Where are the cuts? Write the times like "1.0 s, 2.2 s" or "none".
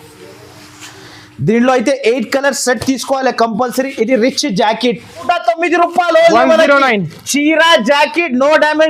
5.2 s